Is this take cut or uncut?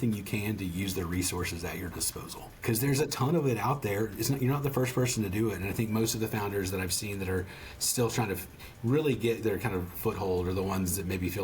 cut